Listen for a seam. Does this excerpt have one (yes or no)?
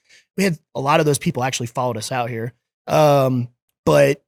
no